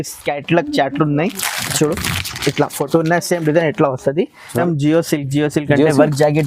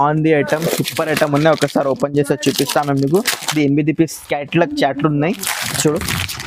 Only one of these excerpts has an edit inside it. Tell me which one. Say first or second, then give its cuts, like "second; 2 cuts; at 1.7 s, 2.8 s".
first; 1 cut; at 4.6 s